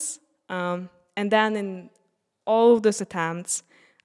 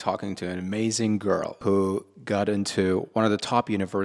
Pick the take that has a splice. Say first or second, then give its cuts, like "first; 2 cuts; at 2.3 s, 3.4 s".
second; 1 cut; at 1.5 s